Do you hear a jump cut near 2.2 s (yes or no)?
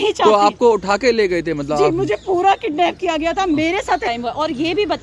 no